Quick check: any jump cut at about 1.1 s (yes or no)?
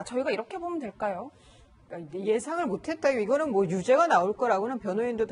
no